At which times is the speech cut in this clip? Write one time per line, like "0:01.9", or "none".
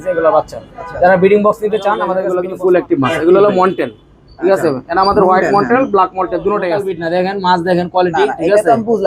0:02.2
0:06.9

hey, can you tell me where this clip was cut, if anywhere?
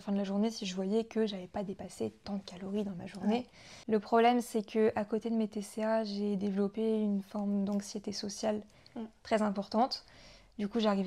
none

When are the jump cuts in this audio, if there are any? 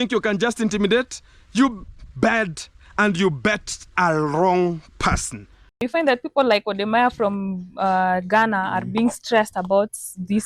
0:05.9

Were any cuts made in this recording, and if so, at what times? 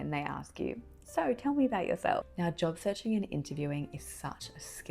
0:02.3

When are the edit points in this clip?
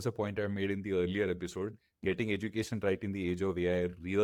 none

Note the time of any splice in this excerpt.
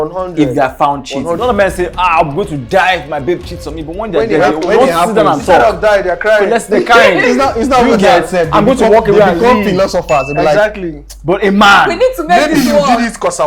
0:01.4

